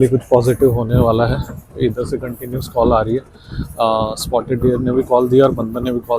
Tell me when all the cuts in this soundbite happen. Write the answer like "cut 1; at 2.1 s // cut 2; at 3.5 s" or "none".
none